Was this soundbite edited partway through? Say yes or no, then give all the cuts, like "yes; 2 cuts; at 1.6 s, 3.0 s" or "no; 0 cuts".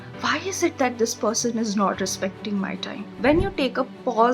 yes; 1 cut; at 3.0 s